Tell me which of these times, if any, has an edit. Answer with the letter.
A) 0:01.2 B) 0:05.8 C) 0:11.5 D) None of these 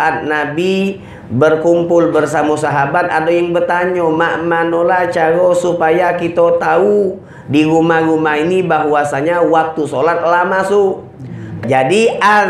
C